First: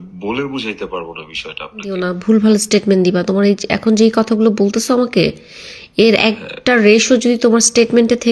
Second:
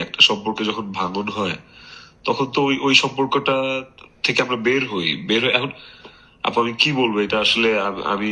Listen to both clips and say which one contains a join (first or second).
first